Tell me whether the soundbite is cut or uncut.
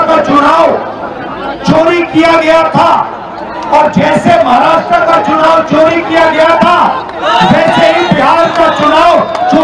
uncut